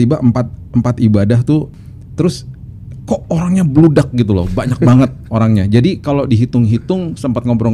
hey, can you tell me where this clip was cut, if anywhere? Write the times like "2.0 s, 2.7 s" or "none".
1.8 s